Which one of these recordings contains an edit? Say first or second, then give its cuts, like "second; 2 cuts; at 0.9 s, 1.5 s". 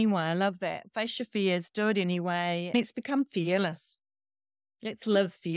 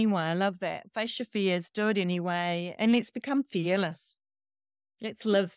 first; 1 cut; at 2.7 s